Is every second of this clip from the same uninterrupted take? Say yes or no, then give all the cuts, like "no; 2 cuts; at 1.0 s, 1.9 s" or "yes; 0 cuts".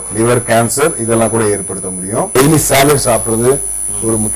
no; 1 cut; at 2.4 s